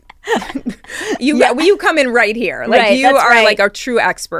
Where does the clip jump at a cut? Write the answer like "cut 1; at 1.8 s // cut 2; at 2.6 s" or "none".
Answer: none